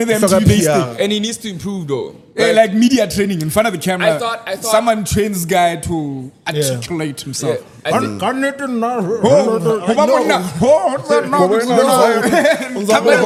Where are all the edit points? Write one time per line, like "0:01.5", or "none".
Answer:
none

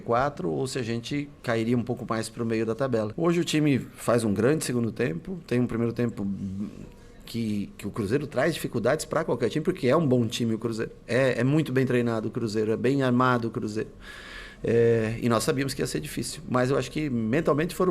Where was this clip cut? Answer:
0:03.1

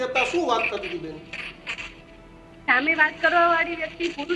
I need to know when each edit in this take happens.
none

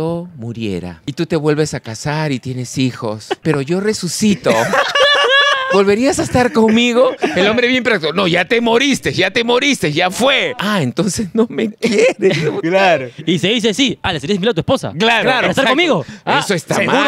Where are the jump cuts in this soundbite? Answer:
0:01.1
0:10.5

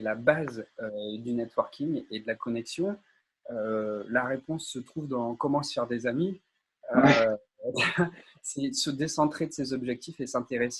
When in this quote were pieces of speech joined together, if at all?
none

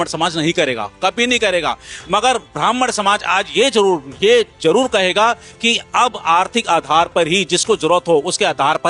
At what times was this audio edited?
none

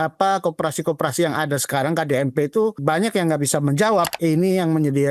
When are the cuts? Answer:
0:02.8
0:04.1

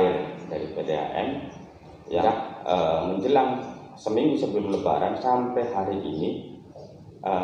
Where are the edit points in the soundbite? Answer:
0:02.3

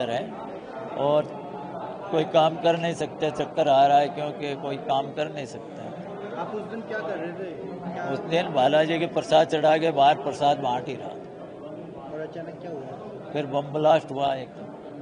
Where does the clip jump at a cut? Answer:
none

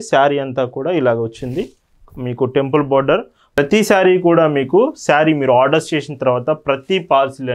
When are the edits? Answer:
0:03.6

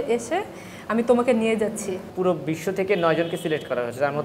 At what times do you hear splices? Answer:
0:02.1

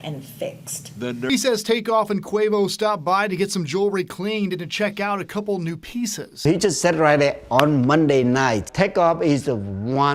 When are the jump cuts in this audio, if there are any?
0:01.3

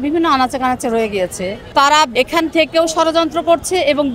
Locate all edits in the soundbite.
0:01.5
0:02.1

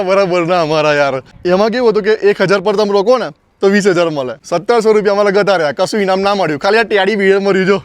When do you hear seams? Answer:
0:01.3
0:04.3

